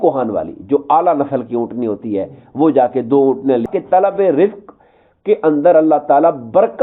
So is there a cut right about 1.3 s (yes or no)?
no